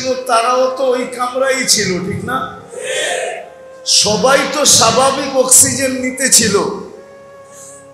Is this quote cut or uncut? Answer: cut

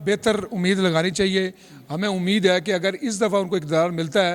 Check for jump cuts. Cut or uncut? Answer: uncut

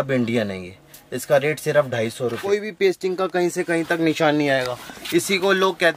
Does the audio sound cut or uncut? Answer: cut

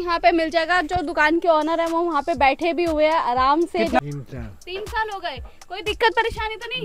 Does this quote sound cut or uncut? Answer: cut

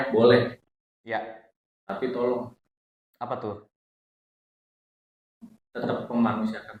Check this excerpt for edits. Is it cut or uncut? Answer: uncut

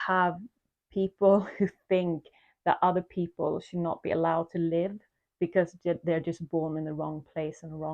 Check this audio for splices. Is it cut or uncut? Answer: uncut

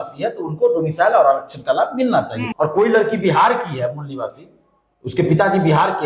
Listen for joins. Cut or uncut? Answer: cut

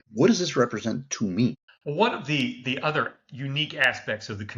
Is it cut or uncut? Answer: cut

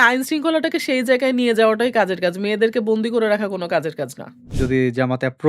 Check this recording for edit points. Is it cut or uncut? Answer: cut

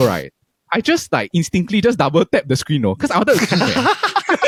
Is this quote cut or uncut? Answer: uncut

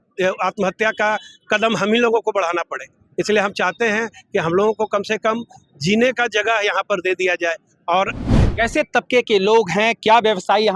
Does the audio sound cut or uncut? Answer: cut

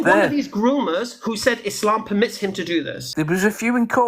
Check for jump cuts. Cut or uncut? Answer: cut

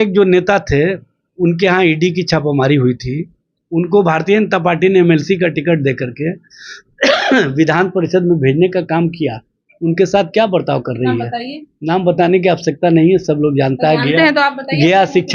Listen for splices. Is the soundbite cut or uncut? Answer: uncut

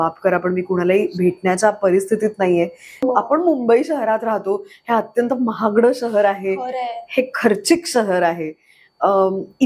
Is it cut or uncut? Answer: cut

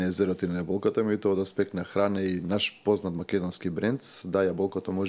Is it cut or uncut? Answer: uncut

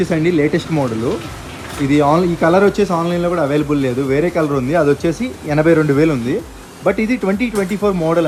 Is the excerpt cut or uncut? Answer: uncut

